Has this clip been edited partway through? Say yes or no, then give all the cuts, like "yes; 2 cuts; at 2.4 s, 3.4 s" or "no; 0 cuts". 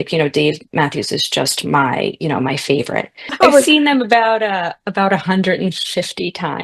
yes; 1 cut; at 3.3 s